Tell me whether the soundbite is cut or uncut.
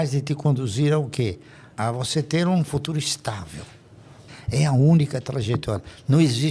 cut